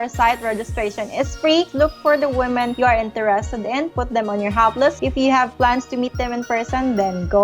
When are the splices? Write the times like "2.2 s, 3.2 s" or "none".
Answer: 1.7 s, 2.7 s, 5.0 s